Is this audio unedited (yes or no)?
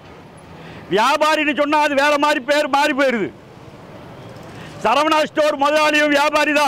yes